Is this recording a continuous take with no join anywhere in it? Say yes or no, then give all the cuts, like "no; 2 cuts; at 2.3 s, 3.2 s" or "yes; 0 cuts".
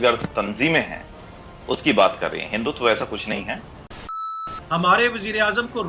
no; 1 cut; at 4.2 s